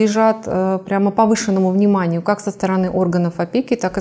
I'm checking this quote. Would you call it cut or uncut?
uncut